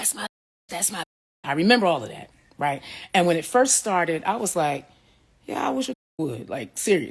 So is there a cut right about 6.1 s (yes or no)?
no